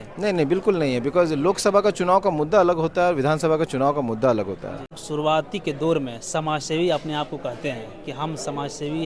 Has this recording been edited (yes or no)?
yes